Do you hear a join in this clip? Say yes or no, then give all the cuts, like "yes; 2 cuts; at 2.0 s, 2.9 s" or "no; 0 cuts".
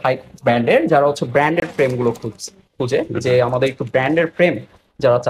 no; 0 cuts